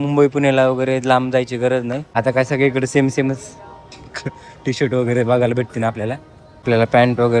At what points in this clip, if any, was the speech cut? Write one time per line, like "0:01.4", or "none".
0:02.0
0:06.6

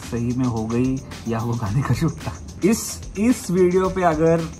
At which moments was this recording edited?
0:02.4

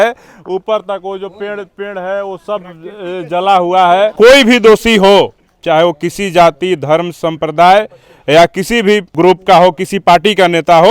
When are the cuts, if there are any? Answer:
0:04.1
0:09.1

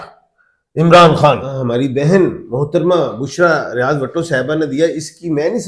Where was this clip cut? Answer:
0:01.5

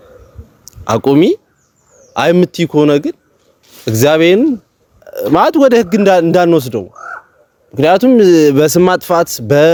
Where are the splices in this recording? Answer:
none

